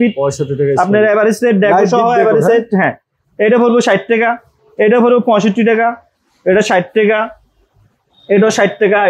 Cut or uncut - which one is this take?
uncut